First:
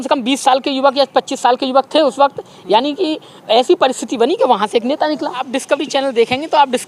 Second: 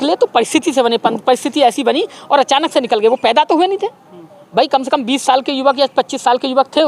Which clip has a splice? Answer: first; 1 cut; at 5.5 s

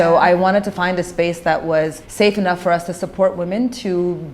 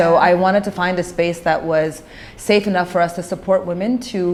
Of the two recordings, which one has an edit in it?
first; 1 cut; at 2.0 s

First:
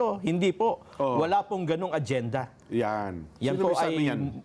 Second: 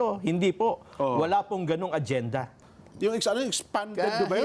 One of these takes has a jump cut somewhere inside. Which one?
second; 1 cut; at 2.6 s

